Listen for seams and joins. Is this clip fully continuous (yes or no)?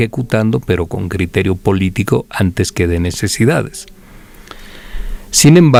yes